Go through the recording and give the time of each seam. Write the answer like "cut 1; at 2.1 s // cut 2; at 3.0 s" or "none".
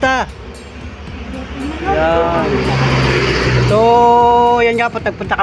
none

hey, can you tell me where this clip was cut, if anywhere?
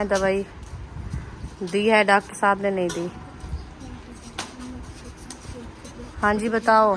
none

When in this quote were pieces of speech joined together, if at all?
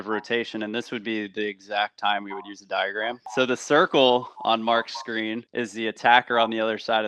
cut 1; at 3.3 s

